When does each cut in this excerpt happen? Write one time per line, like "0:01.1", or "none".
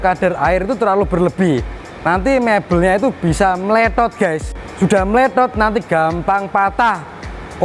none